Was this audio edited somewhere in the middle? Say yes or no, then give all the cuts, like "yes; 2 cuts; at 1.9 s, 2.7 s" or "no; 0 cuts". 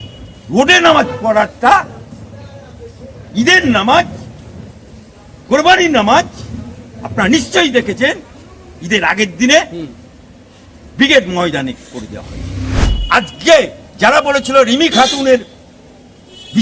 yes; 1 cut; at 12.8 s